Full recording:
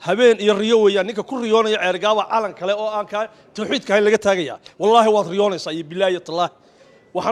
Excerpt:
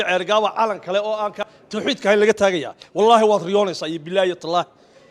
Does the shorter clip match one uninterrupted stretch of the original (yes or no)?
no